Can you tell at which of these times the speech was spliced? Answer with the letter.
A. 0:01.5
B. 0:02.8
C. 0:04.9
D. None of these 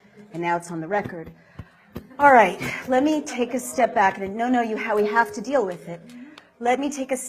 C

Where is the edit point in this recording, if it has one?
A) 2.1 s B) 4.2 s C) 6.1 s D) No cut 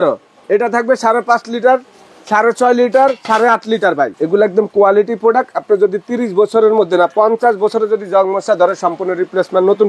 B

